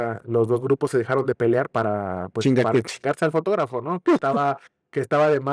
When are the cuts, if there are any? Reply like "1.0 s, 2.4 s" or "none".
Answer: none